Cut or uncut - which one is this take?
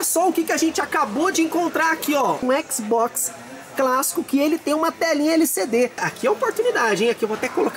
cut